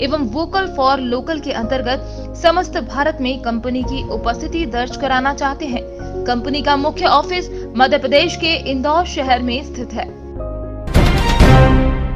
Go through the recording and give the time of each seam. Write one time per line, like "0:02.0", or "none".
0:10.9